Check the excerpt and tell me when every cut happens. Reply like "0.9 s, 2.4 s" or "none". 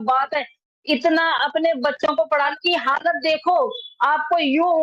2.5 s

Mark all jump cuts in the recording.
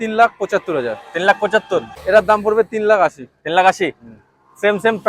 1.9 s

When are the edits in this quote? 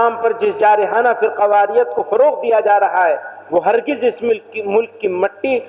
none

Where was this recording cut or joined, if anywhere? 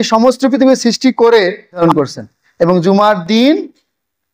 1.8 s

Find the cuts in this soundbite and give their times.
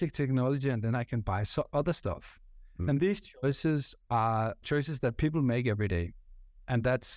4.6 s

